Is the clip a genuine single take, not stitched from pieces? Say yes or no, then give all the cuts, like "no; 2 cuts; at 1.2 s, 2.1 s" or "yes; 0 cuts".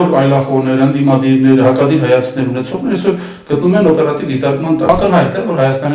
no; 1 cut; at 4.9 s